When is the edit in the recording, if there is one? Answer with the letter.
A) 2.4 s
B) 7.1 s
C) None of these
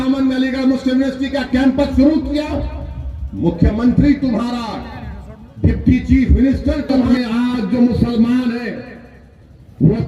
B